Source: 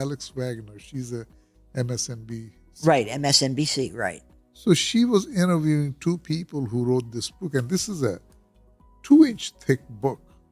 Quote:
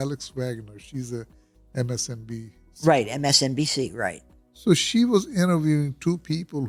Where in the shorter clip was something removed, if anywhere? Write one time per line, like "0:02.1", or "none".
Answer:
none